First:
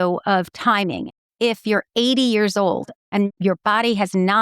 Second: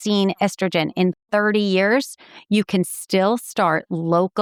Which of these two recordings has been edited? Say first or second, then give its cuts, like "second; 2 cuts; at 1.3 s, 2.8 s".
first; 2 cuts; at 1.0 s, 3.2 s